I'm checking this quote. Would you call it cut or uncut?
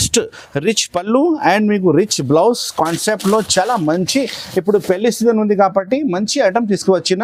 uncut